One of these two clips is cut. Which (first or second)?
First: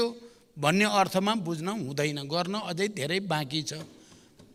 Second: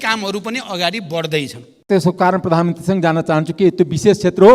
second